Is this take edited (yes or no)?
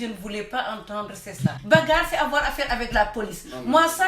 yes